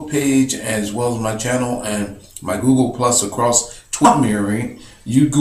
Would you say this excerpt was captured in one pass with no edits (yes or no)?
yes